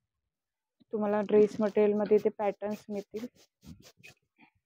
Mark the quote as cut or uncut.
uncut